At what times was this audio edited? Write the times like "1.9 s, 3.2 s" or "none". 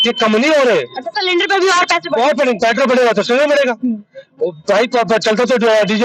none